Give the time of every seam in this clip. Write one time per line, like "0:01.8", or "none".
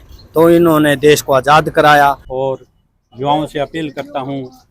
0:02.3